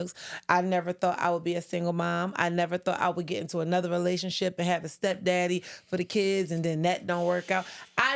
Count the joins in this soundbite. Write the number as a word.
zero